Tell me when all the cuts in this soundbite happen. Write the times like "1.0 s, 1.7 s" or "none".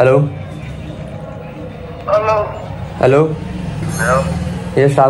3.8 s